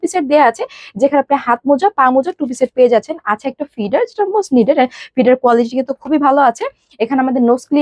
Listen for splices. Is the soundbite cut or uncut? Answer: uncut